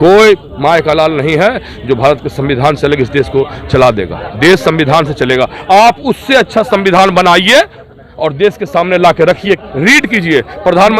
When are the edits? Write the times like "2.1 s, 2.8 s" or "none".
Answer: 9.7 s